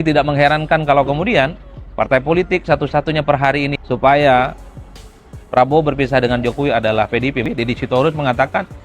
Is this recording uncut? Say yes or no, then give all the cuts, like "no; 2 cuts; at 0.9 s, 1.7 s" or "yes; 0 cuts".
no; 2 cuts; at 3.7 s, 7.4 s